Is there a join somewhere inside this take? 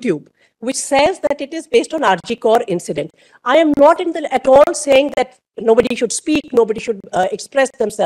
no; 0 cuts

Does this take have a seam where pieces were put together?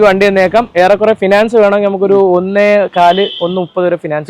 no; 0 cuts

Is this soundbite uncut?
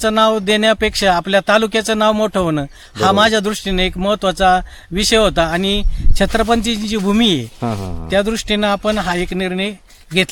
yes; 0 cuts

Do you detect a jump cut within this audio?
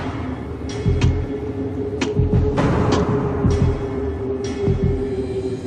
yes; 1 cut; at 3.9 s

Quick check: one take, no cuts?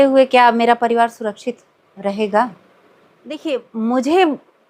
no; 1 cut; at 3.4 s

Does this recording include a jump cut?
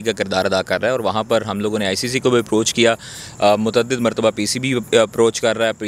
no; 0 cuts

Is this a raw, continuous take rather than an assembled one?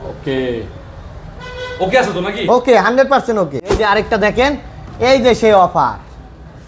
no; 1 cut; at 3.7 s

